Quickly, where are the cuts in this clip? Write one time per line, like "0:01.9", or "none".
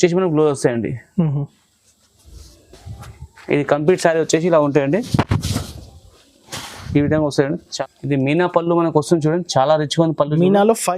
0:07.7